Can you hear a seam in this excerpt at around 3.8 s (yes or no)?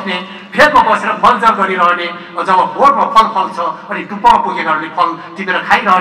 no